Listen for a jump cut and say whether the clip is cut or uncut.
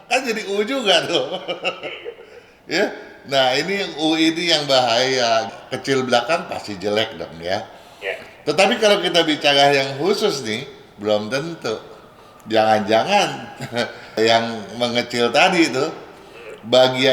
cut